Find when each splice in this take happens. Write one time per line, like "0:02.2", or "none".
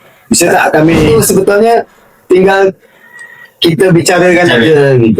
0:01.1